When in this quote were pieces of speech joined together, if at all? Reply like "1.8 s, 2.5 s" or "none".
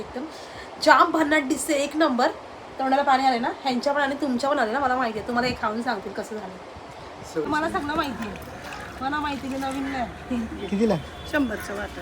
7.4 s